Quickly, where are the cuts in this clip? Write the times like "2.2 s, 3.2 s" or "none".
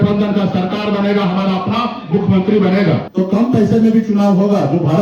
3.1 s